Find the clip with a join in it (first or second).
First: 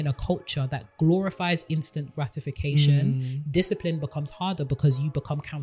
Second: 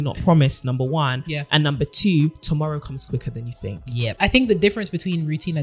second